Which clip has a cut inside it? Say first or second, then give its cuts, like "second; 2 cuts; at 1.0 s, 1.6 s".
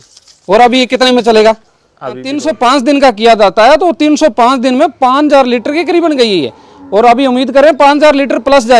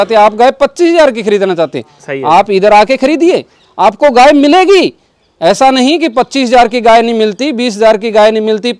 first; 1 cut; at 2.3 s